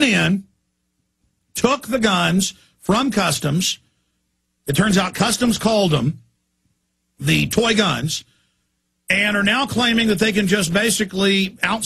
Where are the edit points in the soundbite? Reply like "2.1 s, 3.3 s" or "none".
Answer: 9.4 s